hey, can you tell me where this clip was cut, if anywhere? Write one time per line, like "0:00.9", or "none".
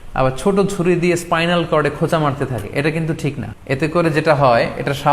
0:03.5